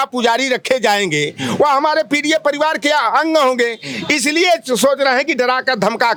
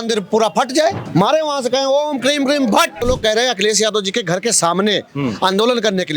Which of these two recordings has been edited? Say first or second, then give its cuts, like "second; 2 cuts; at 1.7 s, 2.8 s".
second; 2 cuts; at 1.0 s, 3.0 s